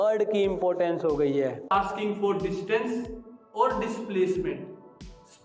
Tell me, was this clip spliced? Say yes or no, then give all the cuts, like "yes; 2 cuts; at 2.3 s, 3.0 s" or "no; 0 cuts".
yes; 1 cut; at 1.7 s